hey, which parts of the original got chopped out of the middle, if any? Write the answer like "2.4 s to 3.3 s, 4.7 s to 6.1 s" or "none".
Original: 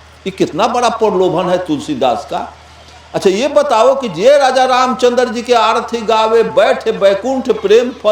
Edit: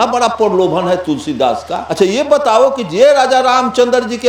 2.4 s to 3.0 s